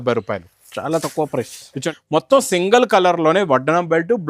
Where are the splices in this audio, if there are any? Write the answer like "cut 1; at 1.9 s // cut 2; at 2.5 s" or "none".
cut 1; at 1.9 s